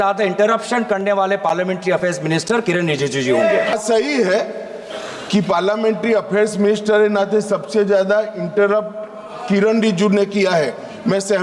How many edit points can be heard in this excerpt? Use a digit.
1